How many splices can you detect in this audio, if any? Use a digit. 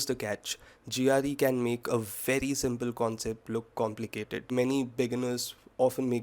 1